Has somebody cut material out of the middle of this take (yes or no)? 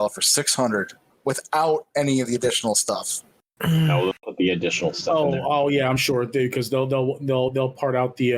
no